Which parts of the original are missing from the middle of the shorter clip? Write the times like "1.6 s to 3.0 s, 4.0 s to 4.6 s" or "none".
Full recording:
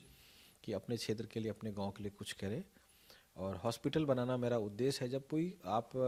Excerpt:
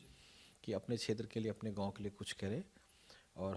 none

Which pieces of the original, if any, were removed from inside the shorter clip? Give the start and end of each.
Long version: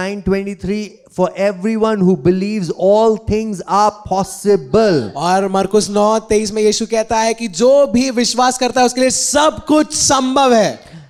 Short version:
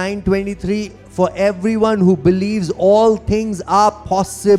none

